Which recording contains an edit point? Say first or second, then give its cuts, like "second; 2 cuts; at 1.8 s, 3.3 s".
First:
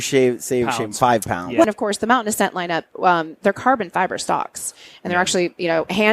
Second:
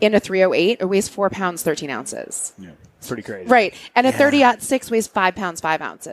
first; 1 cut; at 1.6 s